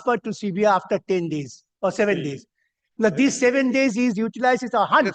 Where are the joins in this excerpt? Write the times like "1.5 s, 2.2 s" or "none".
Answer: none